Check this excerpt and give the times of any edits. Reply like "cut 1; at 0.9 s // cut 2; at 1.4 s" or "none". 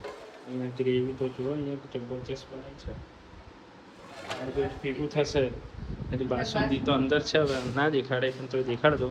none